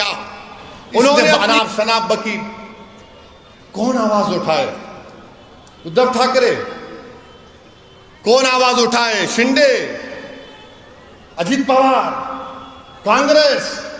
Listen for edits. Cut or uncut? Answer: cut